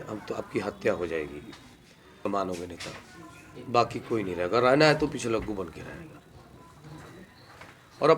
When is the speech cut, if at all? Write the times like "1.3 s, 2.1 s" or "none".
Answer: 2.3 s

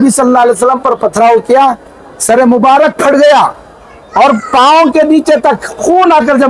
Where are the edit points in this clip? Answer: none

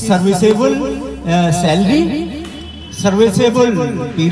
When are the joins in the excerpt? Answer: none

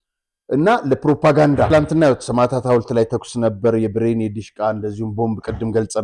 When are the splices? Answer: 1.7 s

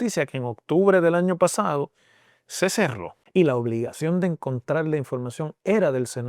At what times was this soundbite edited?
3.1 s

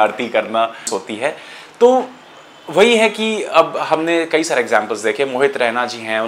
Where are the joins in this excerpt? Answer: 1.0 s

